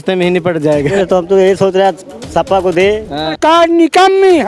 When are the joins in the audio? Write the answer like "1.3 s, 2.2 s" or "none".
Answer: 0.9 s, 3.2 s